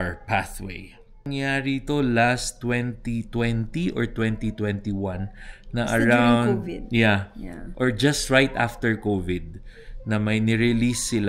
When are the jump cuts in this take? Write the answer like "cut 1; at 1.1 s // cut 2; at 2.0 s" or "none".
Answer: cut 1; at 1.3 s